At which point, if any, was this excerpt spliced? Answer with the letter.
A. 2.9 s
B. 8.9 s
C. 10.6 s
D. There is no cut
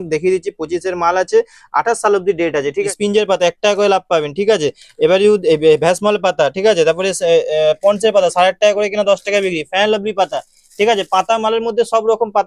A